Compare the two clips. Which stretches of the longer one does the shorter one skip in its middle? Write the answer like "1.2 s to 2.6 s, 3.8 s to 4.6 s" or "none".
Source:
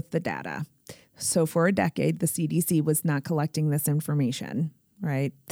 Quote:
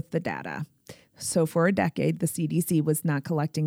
none

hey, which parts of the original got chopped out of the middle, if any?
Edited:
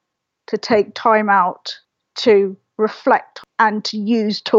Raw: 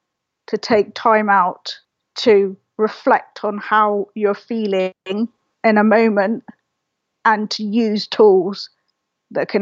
3.4 s to 7.0 s

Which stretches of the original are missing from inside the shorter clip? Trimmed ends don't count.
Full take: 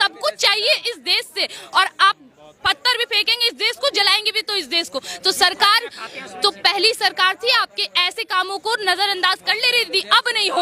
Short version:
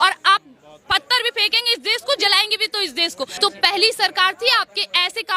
5.1 s to 6.3 s

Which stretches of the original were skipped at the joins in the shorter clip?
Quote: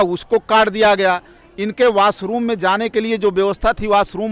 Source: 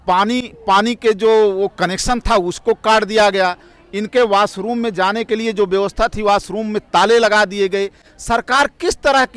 none

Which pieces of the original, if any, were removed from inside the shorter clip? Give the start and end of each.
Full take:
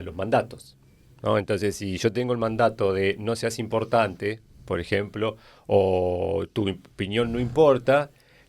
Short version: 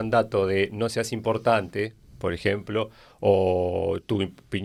none

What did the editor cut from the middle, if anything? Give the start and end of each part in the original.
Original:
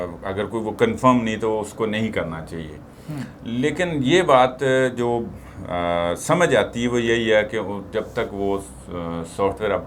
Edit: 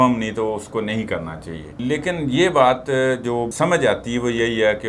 2.7 s to 3.4 s, 5.3 s to 6.2 s

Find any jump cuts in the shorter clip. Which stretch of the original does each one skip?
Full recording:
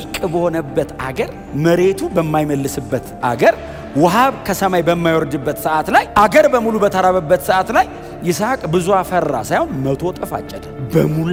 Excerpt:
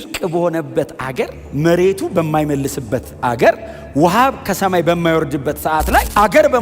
none

